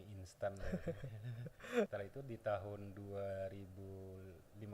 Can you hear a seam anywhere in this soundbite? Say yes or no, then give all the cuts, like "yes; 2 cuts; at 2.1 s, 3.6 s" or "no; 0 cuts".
yes; 1 cut; at 1.9 s